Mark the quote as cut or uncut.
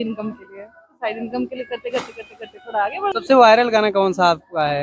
cut